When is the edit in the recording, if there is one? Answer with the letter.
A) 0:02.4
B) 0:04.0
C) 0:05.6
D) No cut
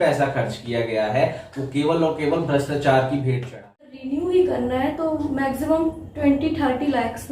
B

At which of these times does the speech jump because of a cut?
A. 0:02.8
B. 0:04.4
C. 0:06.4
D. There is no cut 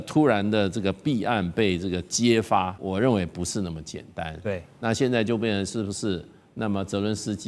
A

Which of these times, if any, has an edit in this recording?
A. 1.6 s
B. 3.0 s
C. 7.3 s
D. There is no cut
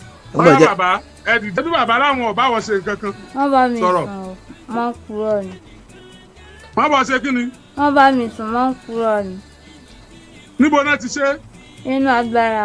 A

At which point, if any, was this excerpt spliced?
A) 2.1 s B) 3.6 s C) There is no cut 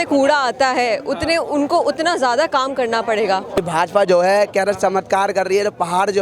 B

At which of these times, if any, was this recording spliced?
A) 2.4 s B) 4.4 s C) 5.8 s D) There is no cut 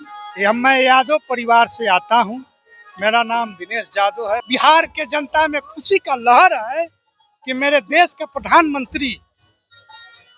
B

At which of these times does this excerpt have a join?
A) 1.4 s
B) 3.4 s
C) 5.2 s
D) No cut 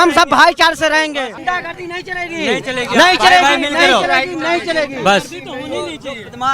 A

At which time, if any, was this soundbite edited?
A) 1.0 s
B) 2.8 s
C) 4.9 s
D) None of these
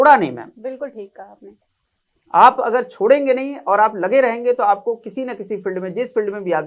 D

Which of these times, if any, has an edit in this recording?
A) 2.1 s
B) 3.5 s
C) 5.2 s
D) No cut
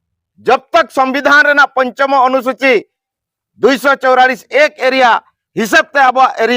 D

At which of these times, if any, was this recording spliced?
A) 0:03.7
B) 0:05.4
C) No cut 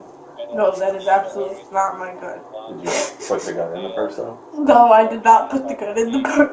C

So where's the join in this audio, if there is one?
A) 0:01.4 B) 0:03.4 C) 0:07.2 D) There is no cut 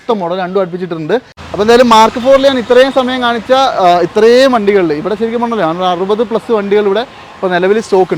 A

